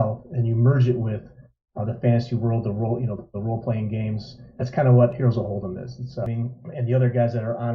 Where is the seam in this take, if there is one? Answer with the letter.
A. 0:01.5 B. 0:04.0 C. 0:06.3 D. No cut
C